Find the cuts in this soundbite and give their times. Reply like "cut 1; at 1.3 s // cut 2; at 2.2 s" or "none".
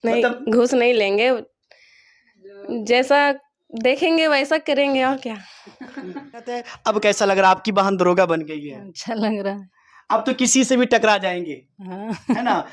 cut 1; at 6.7 s